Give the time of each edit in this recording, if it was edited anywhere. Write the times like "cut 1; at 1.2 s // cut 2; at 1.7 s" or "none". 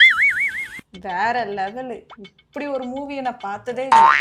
none